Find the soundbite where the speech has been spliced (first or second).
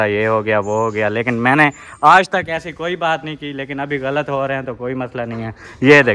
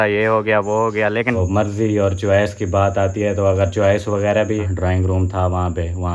second